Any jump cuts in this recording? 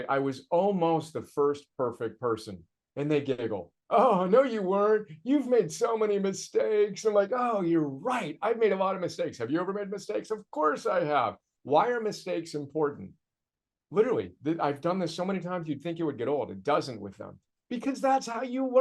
no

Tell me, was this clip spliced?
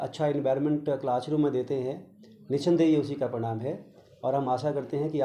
no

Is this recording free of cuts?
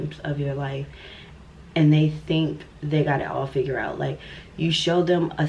yes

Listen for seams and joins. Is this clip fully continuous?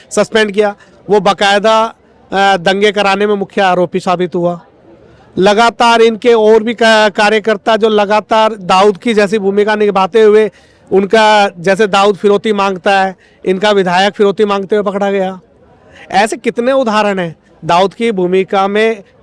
yes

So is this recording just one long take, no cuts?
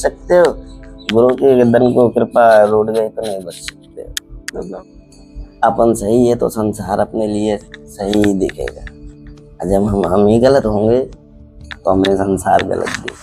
no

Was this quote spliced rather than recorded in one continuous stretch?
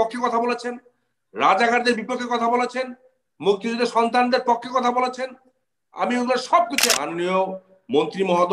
yes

